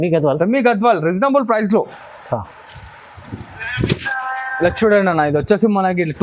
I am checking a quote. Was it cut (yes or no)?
no